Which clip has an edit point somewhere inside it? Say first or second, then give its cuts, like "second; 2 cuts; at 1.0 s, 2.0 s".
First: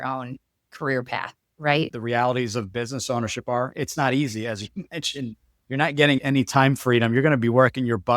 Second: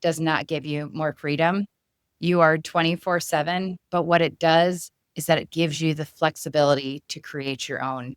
first; 1 cut; at 1.9 s